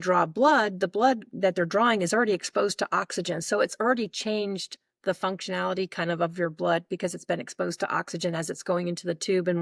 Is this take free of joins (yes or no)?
yes